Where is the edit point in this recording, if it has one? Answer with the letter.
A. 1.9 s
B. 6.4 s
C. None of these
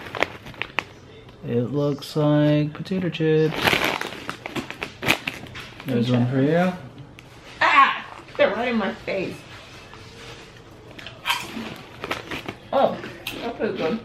B